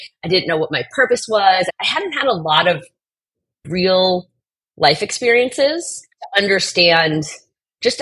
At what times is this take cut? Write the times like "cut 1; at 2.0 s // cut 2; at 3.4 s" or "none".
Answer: cut 1; at 1.7 s